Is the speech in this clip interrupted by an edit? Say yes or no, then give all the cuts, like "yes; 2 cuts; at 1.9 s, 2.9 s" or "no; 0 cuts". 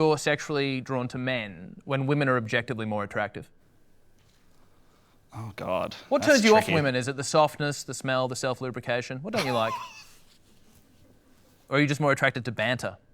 no; 0 cuts